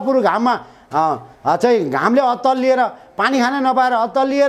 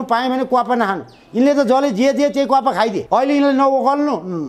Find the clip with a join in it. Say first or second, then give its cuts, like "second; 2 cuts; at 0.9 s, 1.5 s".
second; 1 cut; at 3.0 s